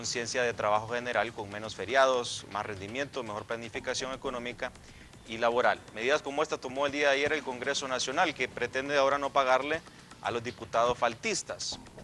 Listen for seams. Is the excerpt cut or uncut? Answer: cut